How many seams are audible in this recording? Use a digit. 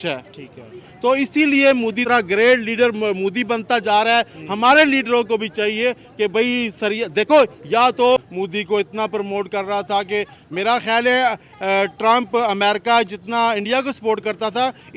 2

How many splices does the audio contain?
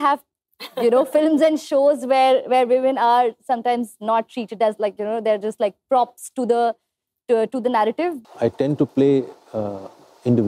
1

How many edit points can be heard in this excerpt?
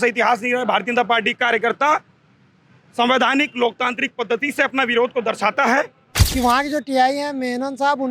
1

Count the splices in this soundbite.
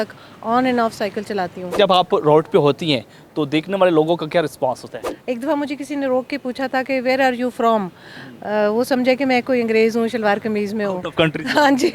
2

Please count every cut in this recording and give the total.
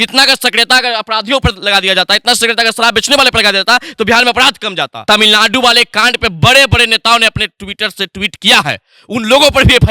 1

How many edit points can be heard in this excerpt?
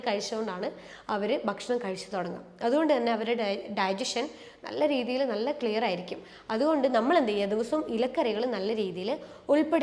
0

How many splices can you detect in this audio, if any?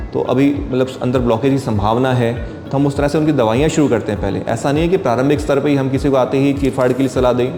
0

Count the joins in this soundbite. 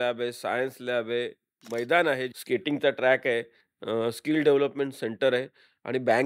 1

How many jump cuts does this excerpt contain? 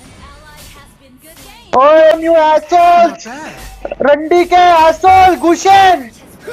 1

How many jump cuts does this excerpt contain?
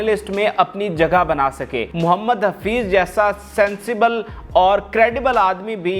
1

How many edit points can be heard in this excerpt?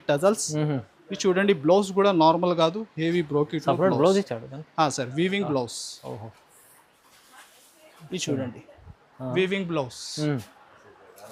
0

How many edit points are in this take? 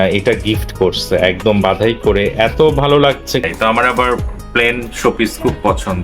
1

